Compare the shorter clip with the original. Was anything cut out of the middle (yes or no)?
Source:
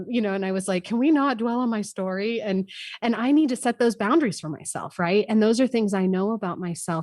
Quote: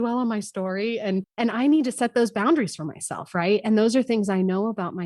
yes